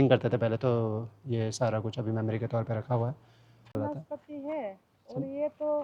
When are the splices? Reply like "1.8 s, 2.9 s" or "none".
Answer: 3.8 s